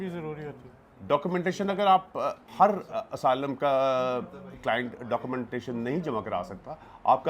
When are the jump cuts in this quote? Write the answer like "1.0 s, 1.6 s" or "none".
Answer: 2.4 s

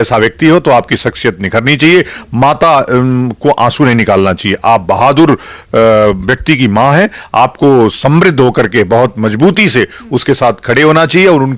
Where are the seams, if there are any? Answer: none

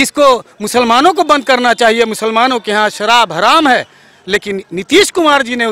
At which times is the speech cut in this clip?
none

